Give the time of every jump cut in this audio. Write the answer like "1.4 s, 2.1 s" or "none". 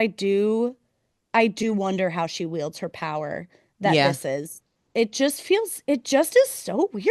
none